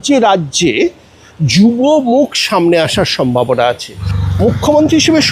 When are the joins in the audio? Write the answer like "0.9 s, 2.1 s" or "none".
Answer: 4.0 s